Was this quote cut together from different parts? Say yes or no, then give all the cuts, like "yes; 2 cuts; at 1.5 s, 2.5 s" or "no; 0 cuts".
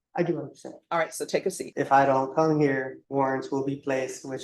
yes; 2 cuts; at 1.6 s, 3.0 s